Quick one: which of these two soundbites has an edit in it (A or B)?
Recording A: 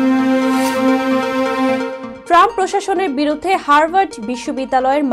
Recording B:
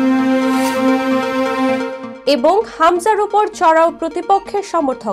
A